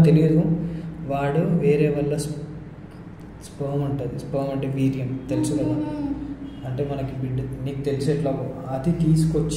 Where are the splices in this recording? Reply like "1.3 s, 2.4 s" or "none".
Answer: none